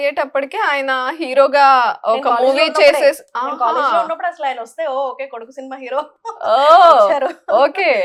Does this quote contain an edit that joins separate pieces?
no; 0 cuts

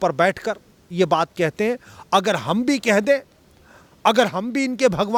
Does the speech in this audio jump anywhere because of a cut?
no; 0 cuts

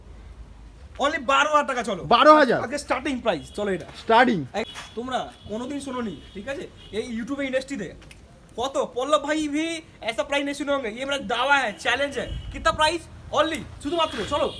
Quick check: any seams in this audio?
yes; 1 cut; at 4.6 s

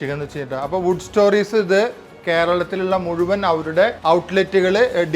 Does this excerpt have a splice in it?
yes; 1 cut; at 4.0 s

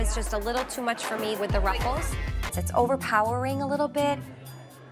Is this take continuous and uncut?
yes; 0 cuts

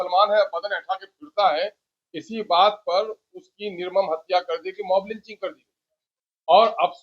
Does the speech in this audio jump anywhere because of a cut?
no; 0 cuts

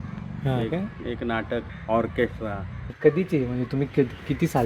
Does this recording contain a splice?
no; 0 cuts

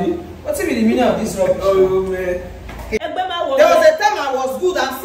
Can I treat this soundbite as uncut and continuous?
no; 1 cut; at 2.9 s

